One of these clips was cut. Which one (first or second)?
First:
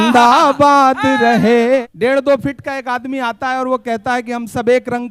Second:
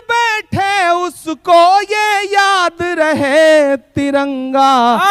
first